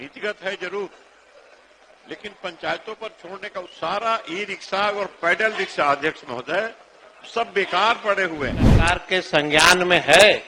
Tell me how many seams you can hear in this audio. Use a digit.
1